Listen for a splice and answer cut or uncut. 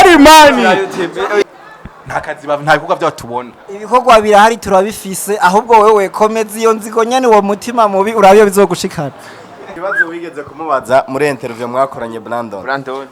cut